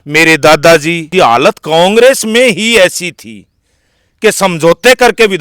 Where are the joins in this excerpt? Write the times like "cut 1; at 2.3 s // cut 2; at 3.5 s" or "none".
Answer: cut 1; at 1.0 s